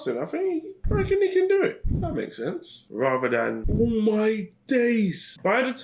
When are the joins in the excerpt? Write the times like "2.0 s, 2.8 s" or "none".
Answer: 1.8 s